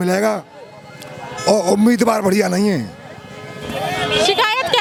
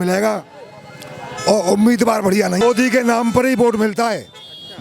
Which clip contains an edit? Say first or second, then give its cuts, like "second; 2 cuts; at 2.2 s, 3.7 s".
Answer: second; 1 cut; at 2.6 s